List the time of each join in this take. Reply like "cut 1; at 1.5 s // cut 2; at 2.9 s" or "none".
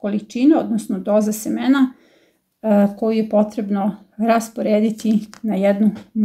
none